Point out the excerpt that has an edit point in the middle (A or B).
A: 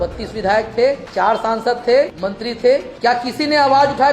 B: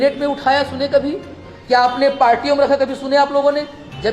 A